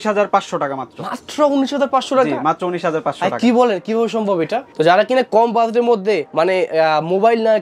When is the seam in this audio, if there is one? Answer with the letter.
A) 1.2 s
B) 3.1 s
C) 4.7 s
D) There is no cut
C